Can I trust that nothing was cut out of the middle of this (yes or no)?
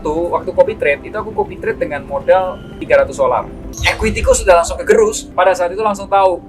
no